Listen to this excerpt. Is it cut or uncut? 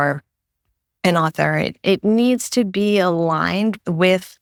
uncut